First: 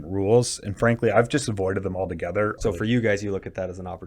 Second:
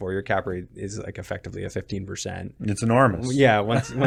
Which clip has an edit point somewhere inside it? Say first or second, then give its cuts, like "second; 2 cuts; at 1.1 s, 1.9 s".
first; 1 cut; at 2.6 s